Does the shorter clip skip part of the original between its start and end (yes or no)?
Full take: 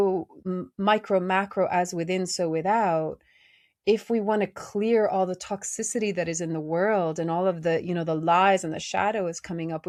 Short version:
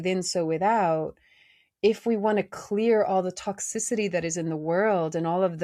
no